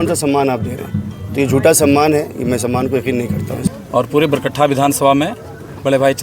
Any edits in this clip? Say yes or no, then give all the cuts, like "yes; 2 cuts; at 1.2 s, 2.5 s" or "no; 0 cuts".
yes; 1 cut; at 3.7 s